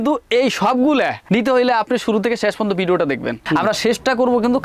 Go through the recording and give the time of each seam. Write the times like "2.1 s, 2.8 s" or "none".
3.4 s